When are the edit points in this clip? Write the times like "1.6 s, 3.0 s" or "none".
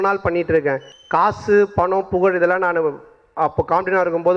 0.9 s